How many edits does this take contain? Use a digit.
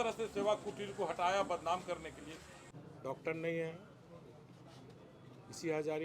1